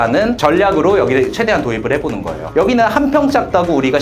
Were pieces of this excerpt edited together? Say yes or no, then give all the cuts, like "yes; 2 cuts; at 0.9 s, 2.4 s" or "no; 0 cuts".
yes; 1 cut; at 2.4 s